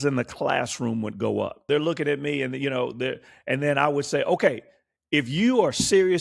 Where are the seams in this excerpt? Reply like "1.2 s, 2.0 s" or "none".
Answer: 1.7 s